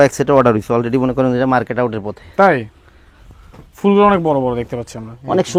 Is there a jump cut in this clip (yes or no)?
no